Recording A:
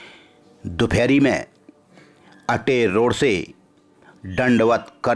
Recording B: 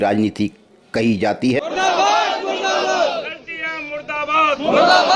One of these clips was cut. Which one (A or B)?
B